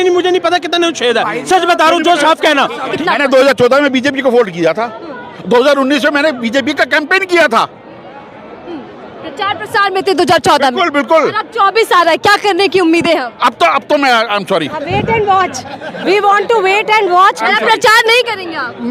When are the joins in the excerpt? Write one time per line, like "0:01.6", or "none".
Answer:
0:02.9